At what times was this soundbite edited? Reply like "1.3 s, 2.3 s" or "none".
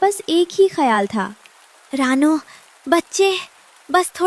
none